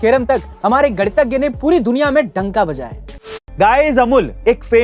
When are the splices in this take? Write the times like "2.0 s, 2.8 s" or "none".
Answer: 3.2 s